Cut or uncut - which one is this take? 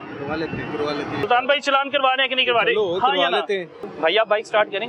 cut